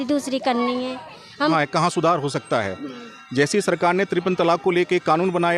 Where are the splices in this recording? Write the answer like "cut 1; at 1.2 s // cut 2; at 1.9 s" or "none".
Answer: cut 1; at 1.5 s

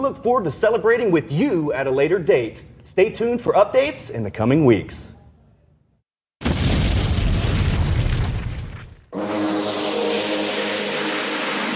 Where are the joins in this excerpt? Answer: cut 1; at 5.9 s

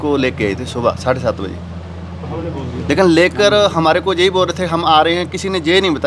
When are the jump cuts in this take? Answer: none

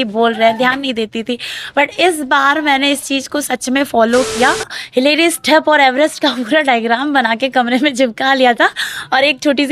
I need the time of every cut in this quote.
cut 1; at 4.8 s

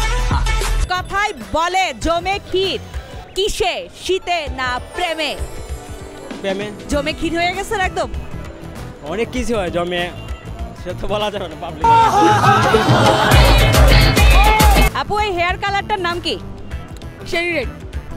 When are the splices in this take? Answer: cut 1; at 0.9 s // cut 2; at 6.9 s // cut 3; at 14.9 s

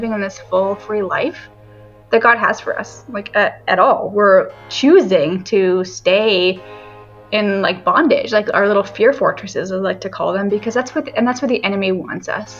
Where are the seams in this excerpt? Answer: none

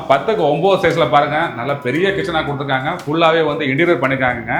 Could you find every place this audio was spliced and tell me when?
none

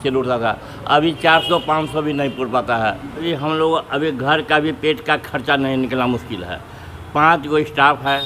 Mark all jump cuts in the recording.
cut 1; at 3.2 s

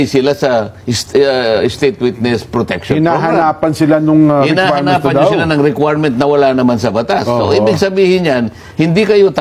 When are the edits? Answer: none

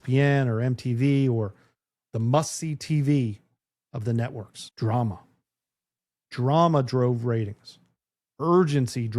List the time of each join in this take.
cut 1; at 4.6 s

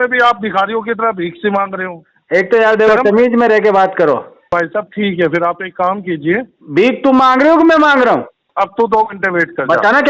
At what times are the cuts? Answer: cut 1; at 4.3 s // cut 2; at 8.4 s

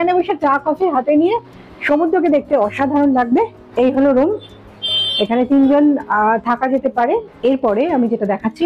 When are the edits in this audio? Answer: cut 1; at 3.6 s // cut 2; at 7.3 s

